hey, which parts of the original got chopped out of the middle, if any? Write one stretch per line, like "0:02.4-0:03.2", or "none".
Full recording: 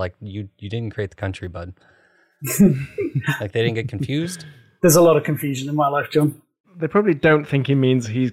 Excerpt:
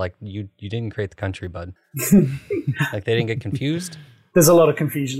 0:01.8-0:02.3